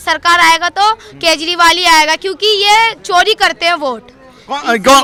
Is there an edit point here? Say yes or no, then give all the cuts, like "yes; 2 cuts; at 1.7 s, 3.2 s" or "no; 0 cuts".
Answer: no; 0 cuts